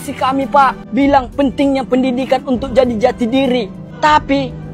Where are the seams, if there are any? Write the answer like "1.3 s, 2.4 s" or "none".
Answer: 0.8 s, 3.8 s